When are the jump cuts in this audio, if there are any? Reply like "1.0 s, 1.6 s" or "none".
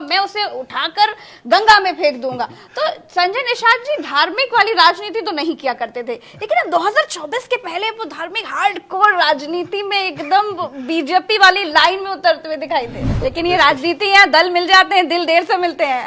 13.0 s

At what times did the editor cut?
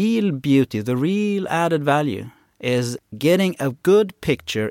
none

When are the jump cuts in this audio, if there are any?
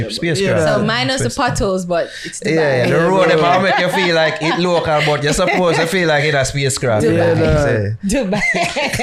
none

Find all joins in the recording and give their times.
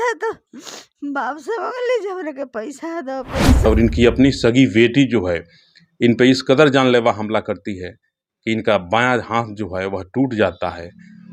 3.6 s

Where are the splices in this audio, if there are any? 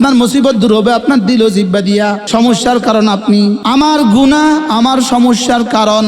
2.2 s, 3.6 s

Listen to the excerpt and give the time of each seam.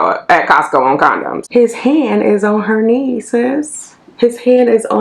1.4 s

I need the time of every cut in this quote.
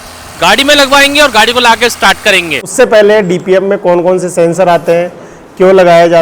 2.6 s

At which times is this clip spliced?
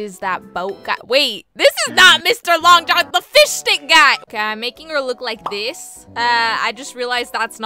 none

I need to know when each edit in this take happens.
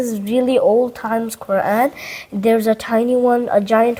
none

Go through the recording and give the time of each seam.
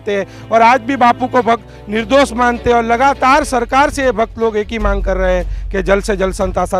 none

